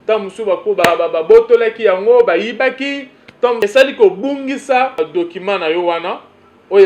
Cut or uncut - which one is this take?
cut